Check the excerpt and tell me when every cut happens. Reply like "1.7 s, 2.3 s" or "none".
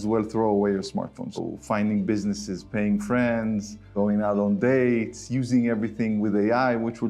1.2 s, 3.9 s

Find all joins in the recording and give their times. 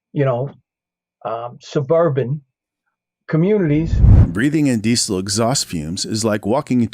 3.9 s

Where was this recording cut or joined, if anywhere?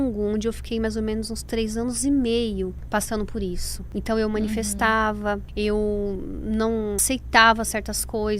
2.8 s, 3.7 s, 5.5 s, 7.0 s

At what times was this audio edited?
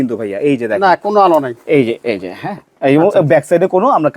none

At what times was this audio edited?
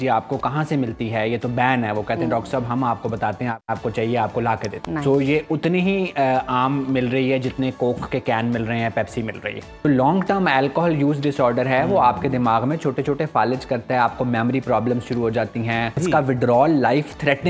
3.6 s, 4.7 s, 9.9 s, 16.0 s

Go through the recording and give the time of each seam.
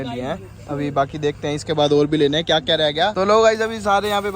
3.1 s

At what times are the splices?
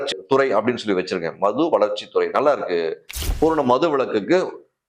3.4 s

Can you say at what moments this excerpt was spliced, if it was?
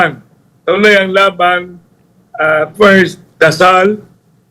3.2 s

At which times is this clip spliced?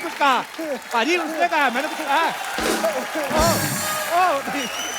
none

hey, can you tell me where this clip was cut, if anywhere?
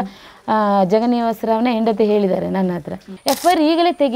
3.1 s

